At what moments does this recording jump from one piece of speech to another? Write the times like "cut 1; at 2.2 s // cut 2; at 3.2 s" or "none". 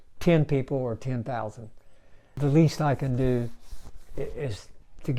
cut 1; at 2.4 s